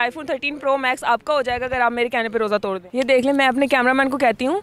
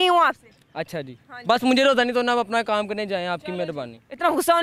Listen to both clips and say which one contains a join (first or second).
first